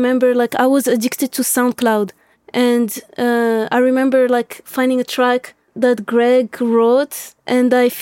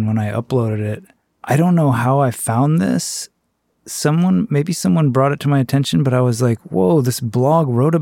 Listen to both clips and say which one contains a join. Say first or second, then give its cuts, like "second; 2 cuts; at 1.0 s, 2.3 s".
first; 1 cut; at 2.3 s